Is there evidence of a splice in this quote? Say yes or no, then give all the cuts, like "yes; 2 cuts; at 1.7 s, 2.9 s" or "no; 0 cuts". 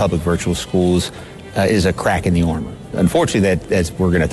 yes; 1 cut; at 2.9 s